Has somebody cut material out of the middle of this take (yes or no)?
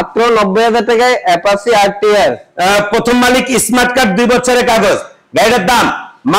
yes